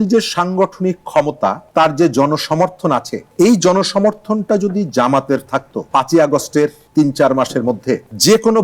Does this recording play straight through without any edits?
no; 2 cuts; at 1.6 s, 5.9 s

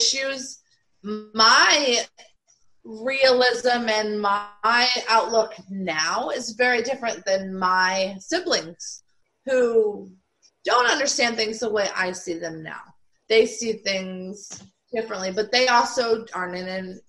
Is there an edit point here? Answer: no; 0 cuts

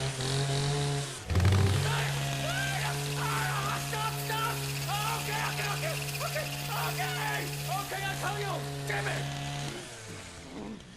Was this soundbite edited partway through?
yes; 1 cut; at 3.1 s

